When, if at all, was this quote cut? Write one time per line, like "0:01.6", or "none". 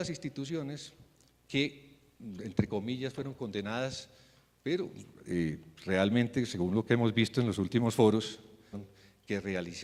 none